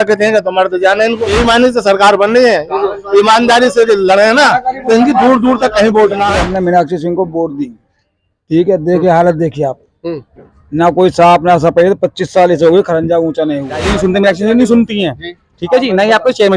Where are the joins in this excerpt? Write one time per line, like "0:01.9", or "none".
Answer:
0:01.3
0:06.3
0:13.9